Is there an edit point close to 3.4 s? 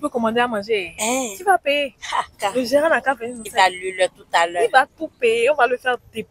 yes; 2 cuts; at 2.3 s, 3.4 s

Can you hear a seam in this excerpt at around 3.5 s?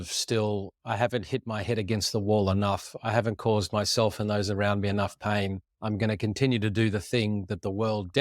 no; 1 cut; at 5.7 s

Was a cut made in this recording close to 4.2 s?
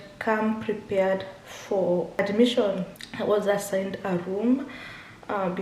no; 2 cuts; at 2.2 s, 3.0 s

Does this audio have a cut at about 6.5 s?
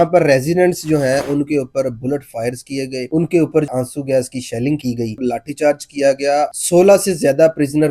yes; 3 cuts; at 3.7 s, 5.2 s, 6.5 s

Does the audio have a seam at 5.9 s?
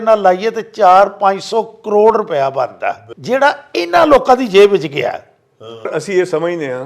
yes; 2 cuts; at 3.1 s, 5.9 s

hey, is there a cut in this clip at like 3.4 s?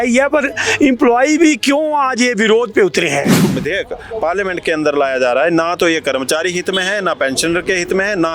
yes; 1 cut; at 3.4 s

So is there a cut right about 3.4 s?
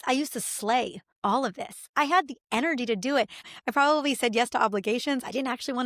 yes; 2 cuts; at 1.0 s, 3.4 s

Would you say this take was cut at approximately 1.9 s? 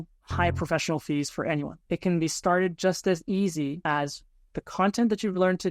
no; 1 cut; at 3.8 s

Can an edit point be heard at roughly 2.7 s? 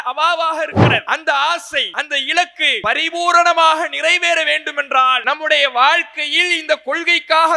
yes; 4 cuts; at 1.0 s, 2.0 s, 2.7 s, 5.2 s

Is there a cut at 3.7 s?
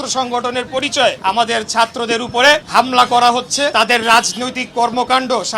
yes; 3 cuts; at 1.2 s, 2.7 s, 3.7 s

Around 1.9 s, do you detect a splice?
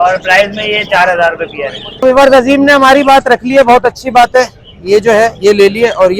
yes; 1 cut; at 1.9 s

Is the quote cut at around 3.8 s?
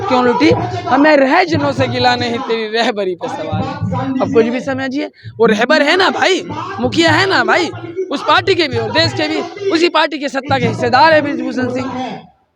no; 0 cuts

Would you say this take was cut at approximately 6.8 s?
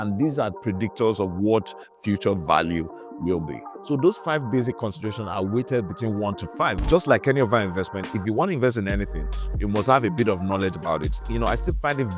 yes; 1 cut; at 6.8 s

